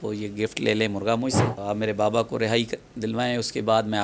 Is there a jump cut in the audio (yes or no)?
yes